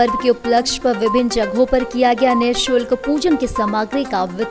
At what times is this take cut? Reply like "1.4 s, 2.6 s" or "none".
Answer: none